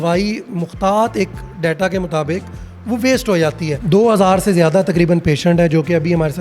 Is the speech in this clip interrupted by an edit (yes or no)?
yes